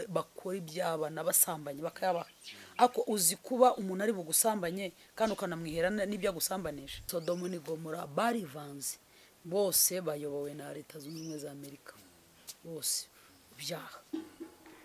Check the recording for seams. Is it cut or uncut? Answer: cut